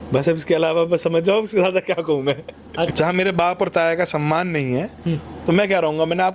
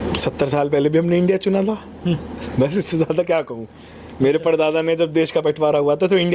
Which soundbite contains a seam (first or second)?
first